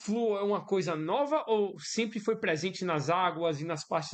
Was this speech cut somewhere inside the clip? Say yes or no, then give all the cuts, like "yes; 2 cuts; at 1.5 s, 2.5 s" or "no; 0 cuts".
no; 0 cuts